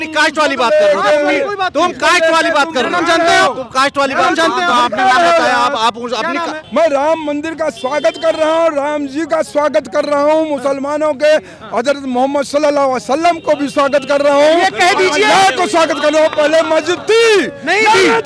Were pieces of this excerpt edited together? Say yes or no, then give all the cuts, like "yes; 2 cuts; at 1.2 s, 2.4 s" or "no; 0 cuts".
yes; 1 cut; at 6.6 s